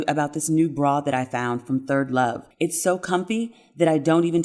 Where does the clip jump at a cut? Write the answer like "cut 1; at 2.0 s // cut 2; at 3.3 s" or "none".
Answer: cut 1; at 2.4 s